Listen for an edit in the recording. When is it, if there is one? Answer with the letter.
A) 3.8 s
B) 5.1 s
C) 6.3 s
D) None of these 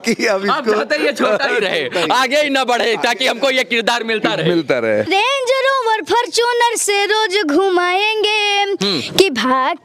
B